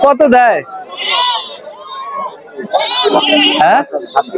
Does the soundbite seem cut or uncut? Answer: uncut